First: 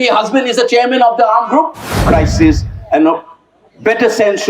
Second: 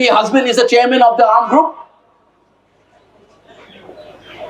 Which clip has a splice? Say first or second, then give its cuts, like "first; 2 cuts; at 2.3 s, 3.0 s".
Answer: first; 1 cut; at 1.9 s